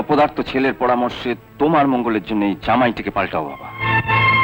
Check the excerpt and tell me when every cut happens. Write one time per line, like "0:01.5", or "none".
none